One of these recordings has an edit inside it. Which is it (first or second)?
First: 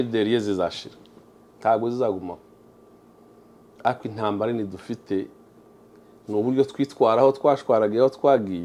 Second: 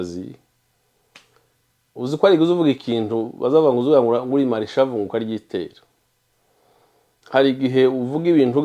second